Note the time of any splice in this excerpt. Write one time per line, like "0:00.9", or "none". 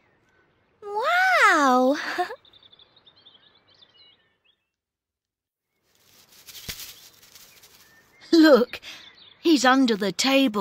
none